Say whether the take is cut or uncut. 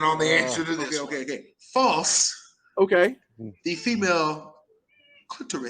cut